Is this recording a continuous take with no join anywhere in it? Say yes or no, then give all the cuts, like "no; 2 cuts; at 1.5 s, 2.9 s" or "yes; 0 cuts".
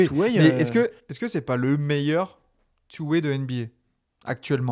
yes; 0 cuts